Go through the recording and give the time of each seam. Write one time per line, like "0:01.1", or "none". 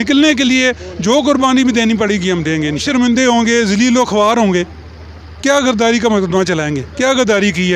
0:02.8

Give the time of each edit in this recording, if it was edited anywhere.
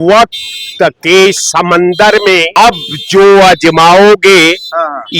0:02.5

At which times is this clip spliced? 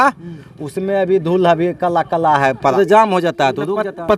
0:02.7

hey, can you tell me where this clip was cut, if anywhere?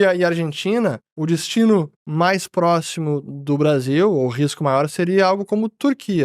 none

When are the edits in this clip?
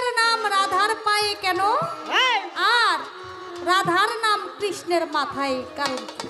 none

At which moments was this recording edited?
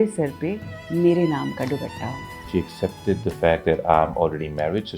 0:02.5

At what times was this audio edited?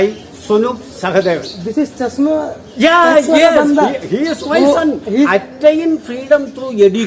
0:05.3

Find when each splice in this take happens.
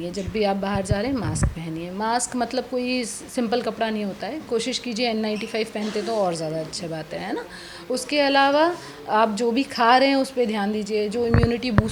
none

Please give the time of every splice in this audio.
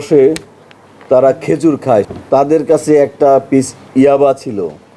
0:02.1

